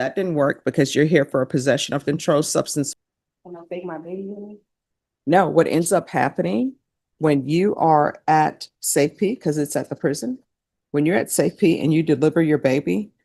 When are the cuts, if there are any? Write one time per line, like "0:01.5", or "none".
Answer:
0:02.9